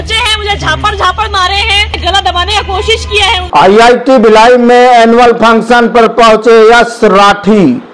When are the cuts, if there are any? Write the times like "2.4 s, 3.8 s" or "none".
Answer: 1.9 s, 3.4 s

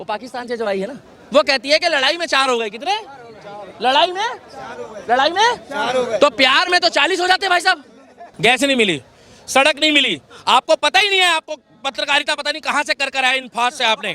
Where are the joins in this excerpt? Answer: 8.2 s

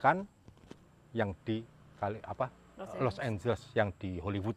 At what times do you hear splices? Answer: none

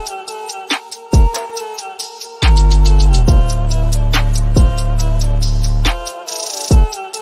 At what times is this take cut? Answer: 1.5 s

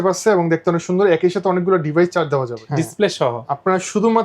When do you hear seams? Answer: 2.6 s

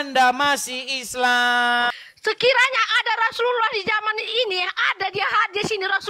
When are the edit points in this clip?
1.9 s

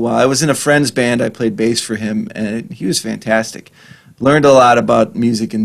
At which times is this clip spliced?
none

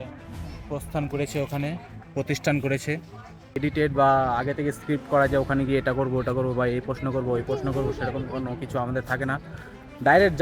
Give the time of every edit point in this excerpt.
3.6 s

